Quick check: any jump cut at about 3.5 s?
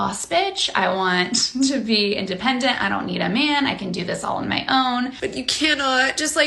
no; 1 cut; at 5.2 s

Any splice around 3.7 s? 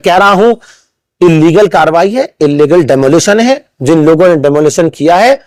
no; 0 cuts

